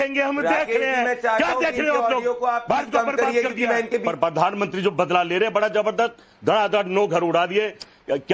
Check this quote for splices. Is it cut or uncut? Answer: cut